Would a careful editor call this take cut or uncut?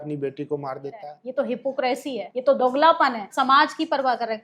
cut